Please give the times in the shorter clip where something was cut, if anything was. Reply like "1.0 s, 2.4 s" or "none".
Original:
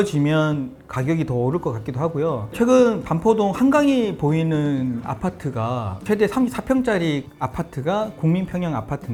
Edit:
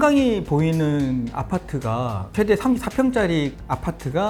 none